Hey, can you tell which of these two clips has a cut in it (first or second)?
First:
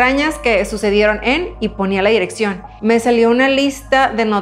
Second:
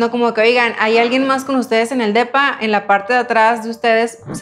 first